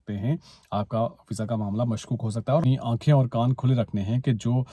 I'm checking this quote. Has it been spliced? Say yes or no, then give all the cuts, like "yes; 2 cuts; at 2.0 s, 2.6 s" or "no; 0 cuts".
yes; 1 cut; at 2.6 s